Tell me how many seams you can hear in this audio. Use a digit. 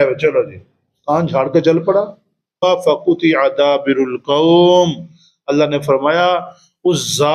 1